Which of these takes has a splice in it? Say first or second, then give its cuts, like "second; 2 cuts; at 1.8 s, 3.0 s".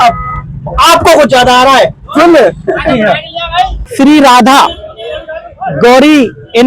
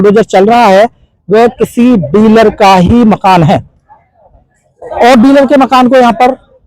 first; 1 cut; at 3.8 s